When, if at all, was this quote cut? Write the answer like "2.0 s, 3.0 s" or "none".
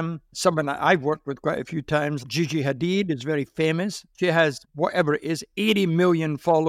4.4 s

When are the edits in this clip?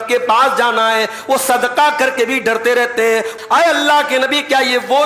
3.3 s

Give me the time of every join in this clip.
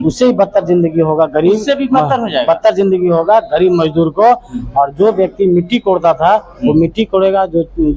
none

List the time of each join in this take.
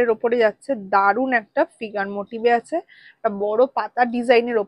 none

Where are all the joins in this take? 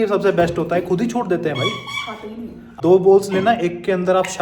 2.8 s

